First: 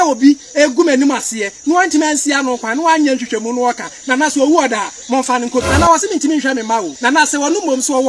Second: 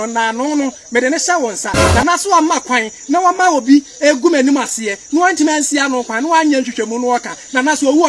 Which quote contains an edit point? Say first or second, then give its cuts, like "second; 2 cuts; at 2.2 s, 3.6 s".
first; 2 cuts; at 5.7 s, 6.9 s